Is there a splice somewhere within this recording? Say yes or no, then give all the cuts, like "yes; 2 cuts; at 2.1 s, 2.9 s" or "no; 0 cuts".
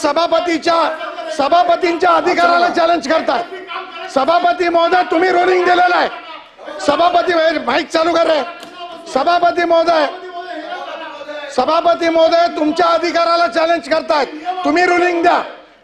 no; 0 cuts